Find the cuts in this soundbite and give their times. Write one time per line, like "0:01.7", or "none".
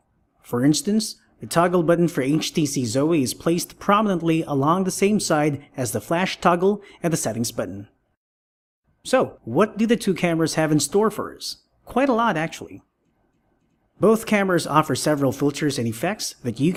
none